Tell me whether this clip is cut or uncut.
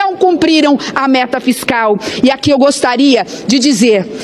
uncut